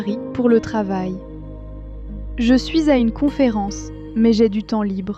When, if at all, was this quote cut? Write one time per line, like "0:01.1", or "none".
0:01.7